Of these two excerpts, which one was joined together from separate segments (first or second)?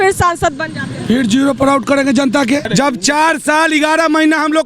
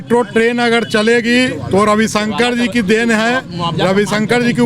first